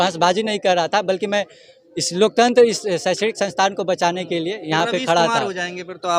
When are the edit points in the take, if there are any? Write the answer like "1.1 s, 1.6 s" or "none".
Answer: none